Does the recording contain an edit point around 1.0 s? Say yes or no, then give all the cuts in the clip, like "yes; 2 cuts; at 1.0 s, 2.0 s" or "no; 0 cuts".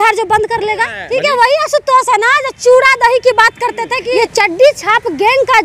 yes; 2 cuts; at 1.0 s, 3.9 s